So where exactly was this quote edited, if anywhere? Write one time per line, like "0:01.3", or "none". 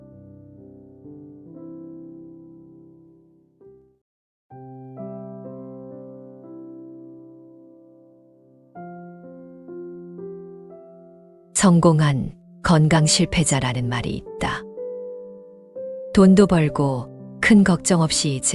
none